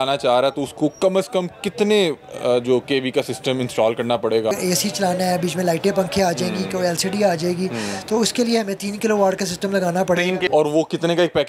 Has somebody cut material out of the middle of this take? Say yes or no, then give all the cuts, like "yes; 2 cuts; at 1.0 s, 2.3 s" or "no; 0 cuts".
yes; 2 cuts; at 4.5 s, 10.5 s